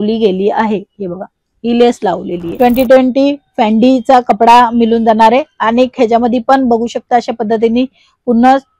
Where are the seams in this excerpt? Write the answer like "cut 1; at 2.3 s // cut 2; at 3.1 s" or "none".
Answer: cut 1; at 2.4 s